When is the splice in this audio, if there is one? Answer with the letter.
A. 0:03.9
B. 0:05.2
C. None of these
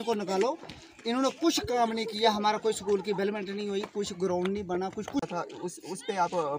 B